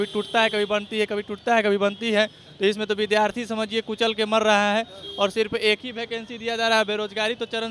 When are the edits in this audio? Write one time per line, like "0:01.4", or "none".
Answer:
none